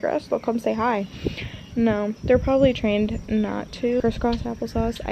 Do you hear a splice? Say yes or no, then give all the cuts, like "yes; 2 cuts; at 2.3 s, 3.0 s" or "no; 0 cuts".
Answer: yes; 1 cut; at 4.0 s